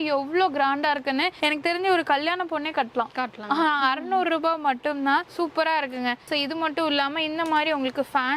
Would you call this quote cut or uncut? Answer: uncut